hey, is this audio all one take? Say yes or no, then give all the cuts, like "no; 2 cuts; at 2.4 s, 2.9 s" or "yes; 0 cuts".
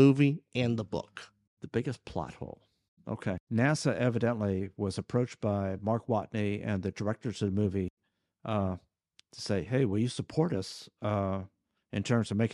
no; 1 cut; at 3.4 s